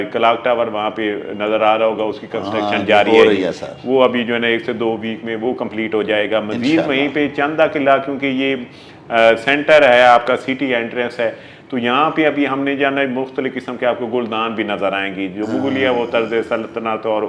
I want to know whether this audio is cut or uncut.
uncut